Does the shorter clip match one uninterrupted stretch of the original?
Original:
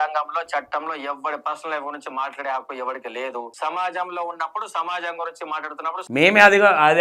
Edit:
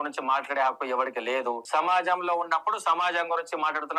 yes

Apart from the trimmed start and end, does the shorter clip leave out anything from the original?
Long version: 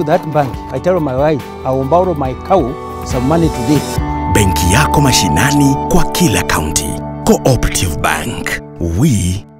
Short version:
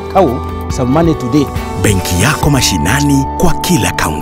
yes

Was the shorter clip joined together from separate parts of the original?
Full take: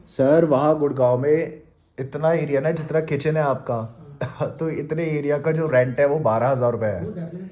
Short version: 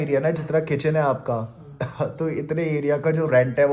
no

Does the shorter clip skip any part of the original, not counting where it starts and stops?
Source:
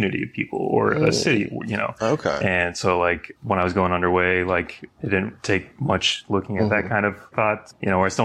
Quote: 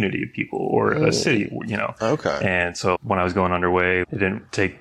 yes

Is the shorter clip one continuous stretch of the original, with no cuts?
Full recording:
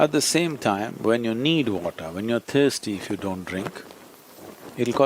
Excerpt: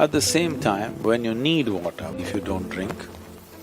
no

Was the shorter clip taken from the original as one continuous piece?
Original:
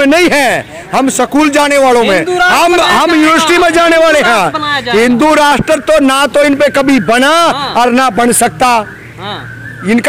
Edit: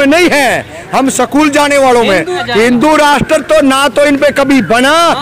no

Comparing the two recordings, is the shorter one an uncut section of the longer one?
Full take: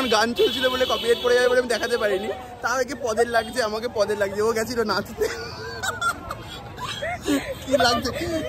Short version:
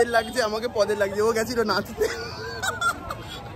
yes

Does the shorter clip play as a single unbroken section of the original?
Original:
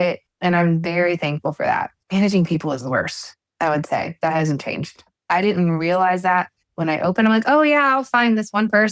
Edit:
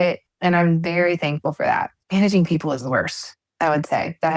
yes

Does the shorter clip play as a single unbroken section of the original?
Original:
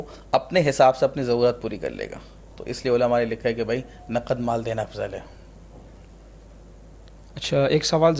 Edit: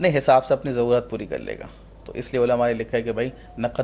yes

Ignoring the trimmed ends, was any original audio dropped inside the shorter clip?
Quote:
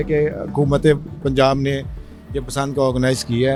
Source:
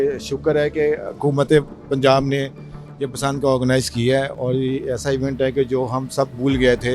no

